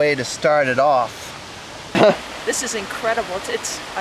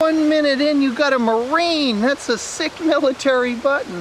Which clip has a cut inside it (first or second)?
first